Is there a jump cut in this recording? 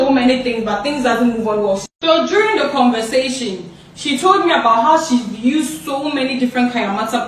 no; 0 cuts

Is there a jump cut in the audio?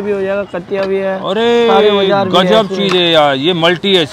no; 0 cuts

